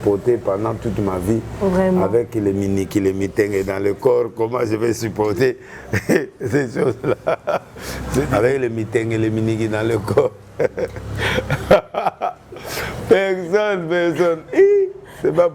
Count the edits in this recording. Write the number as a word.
one